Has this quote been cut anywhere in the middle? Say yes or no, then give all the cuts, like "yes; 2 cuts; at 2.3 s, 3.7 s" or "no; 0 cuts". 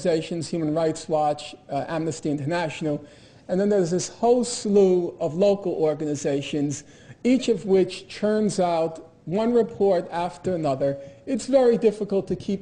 yes; 1 cut; at 9.6 s